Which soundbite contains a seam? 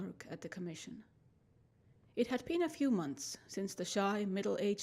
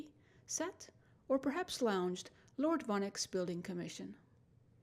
first; 1 cut; at 3.8 s

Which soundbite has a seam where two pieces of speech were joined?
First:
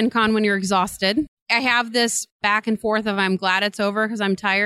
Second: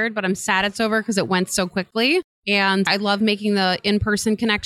first; 2 cuts; at 1.4 s, 2.4 s

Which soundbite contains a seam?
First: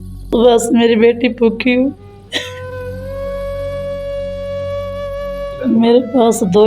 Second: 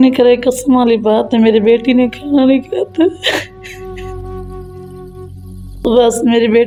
first; 2 cuts; at 2.5 s, 5.5 s

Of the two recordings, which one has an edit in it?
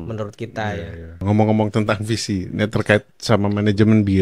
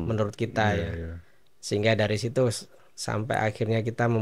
first; 2 cuts; at 1.2 s, 3.1 s

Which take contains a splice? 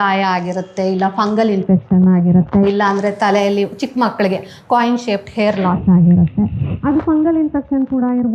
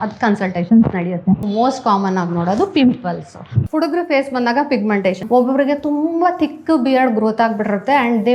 second; 3 cuts; at 1.4 s, 3.5 s, 5.2 s

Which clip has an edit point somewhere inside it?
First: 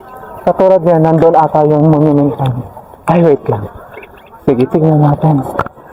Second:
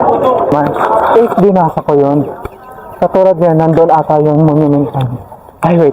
second; 1 cut; at 1.1 s

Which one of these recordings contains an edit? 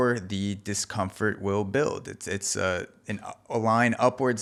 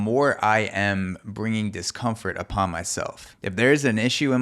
second; 1 cut; at 3.3 s

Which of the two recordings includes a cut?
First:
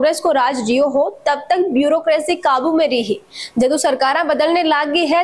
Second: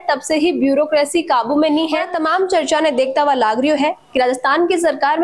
second; 1 cut; at 2.1 s

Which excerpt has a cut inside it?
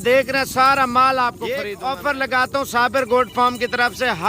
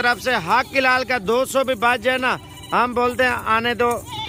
first; 1 cut; at 1.7 s

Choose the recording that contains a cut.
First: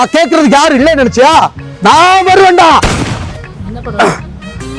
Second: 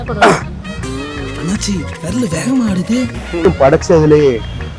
second; 1 cut; at 3.5 s

